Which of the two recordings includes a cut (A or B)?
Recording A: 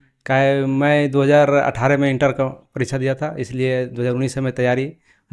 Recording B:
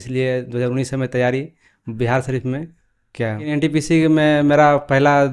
B